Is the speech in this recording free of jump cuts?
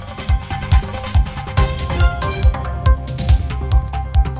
no; 1 cut; at 2.4 s

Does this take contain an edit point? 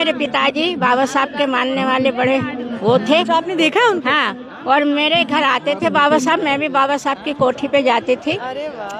no; 0 cuts

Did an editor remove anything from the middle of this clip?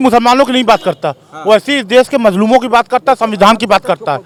no; 0 cuts

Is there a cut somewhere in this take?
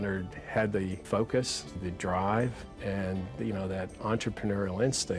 yes; 3 cuts; at 1.0 s, 1.8 s, 2.7 s

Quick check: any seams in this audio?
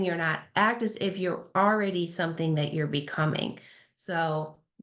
no; 0 cuts

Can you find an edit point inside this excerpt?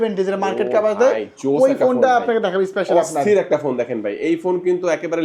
no; 0 cuts

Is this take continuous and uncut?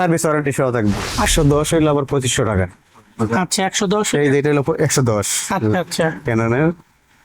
no; 1 cut; at 1.3 s

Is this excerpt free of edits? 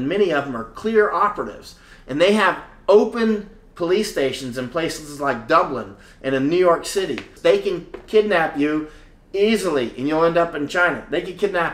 no; 1 cut; at 7.3 s

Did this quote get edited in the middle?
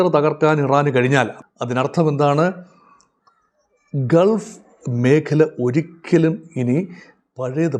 yes; 1 cut; at 1.4 s

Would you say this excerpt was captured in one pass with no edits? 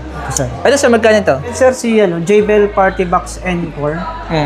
no; 1 cut; at 1.5 s

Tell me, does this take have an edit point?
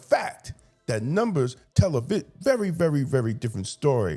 no; 0 cuts

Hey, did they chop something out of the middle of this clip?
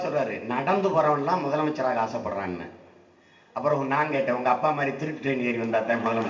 no; 0 cuts

